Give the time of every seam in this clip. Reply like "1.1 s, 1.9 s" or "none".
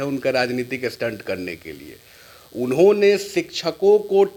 none